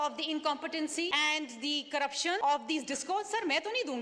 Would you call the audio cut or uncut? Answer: cut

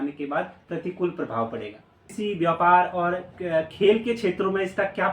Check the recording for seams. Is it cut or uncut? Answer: cut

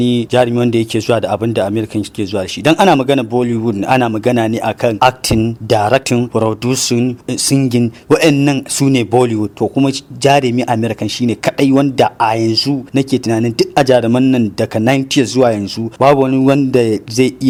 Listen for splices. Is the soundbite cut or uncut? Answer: uncut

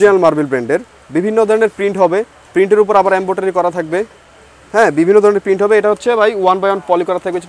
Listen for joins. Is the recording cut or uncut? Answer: uncut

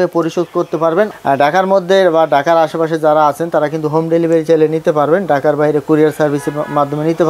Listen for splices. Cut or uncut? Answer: uncut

